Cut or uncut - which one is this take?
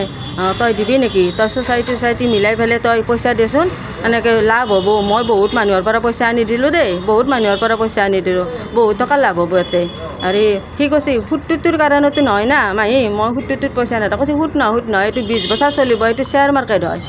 uncut